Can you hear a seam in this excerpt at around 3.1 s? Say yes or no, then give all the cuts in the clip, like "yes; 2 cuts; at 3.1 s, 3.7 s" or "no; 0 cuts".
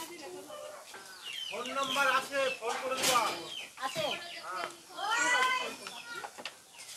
no; 1 cut; at 1.2 s